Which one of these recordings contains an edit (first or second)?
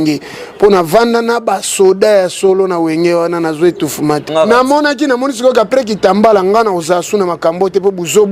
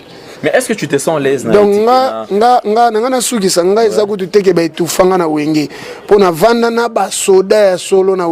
first